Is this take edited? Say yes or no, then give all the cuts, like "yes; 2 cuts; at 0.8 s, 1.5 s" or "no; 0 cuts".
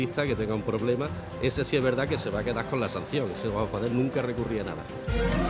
yes; 1 cut; at 1.8 s